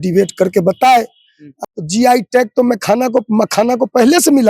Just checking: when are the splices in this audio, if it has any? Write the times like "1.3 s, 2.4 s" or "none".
1.6 s